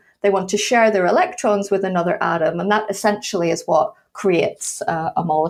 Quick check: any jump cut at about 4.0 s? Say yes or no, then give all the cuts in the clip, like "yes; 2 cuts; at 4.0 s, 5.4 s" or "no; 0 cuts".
no; 0 cuts